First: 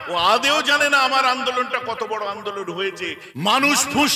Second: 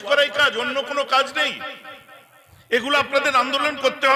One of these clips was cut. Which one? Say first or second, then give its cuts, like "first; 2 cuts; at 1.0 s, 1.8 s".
first; 1 cut; at 3.2 s